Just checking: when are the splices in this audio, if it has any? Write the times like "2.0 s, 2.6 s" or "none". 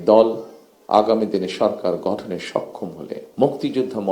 3.2 s